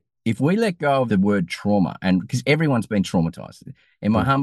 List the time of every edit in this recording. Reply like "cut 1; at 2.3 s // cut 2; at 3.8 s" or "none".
cut 1; at 1.1 s